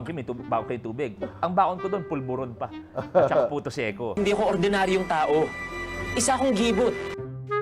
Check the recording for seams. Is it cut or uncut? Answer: uncut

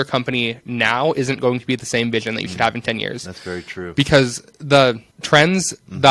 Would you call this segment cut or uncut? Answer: cut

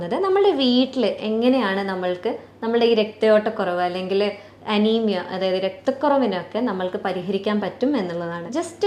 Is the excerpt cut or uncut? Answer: uncut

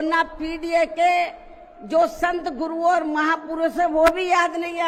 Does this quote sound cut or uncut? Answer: uncut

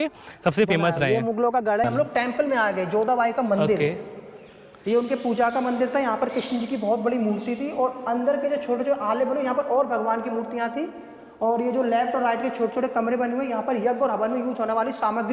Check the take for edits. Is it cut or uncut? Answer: uncut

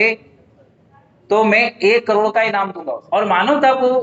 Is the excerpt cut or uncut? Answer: cut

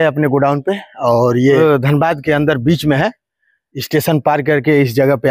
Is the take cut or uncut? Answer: cut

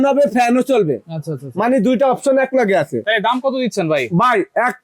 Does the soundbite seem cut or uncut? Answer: cut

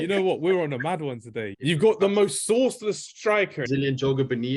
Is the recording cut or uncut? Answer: cut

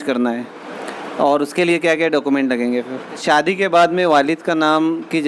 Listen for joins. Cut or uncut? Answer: cut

